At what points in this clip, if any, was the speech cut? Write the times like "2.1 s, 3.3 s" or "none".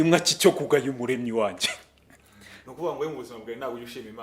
2.7 s